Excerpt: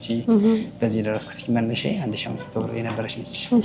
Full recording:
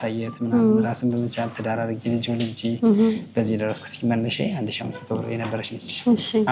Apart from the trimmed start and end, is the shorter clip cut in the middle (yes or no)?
no